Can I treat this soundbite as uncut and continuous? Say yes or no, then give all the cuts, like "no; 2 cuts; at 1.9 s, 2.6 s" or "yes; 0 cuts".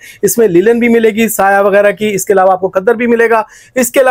yes; 0 cuts